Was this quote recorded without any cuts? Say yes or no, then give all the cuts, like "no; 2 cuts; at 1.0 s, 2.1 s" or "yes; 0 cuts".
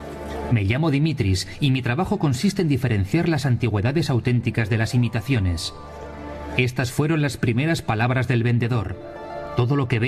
yes; 0 cuts